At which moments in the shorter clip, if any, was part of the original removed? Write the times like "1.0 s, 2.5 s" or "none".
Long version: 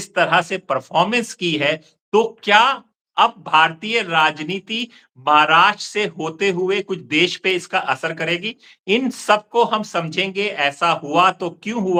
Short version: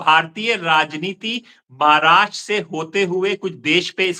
none